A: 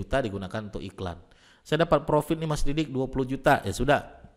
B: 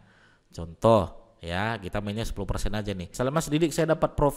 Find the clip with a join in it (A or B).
B